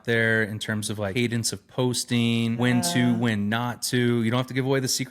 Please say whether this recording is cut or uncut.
cut